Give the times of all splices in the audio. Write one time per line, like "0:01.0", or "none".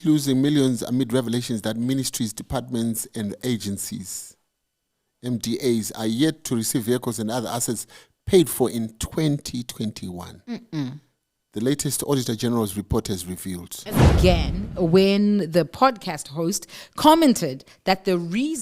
0:14.1